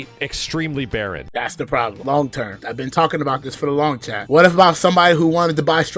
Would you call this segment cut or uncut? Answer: cut